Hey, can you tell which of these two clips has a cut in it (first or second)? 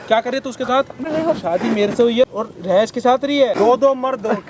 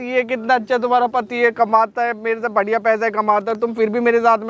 first